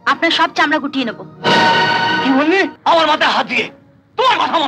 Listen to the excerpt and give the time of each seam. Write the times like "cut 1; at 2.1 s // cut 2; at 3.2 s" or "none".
cut 1; at 2.8 s